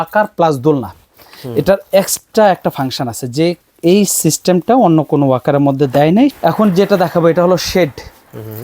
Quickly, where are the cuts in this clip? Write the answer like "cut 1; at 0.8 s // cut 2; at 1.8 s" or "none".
cut 1; at 6.4 s